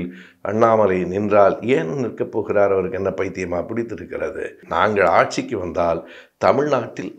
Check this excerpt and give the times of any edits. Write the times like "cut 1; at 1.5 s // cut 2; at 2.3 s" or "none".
cut 1; at 4.6 s